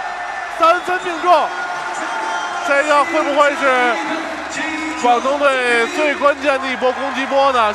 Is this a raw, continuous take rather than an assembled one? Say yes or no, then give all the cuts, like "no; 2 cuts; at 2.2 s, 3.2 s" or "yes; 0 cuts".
yes; 0 cuts